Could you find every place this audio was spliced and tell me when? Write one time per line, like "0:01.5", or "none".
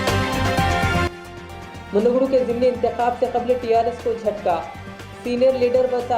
0:01.0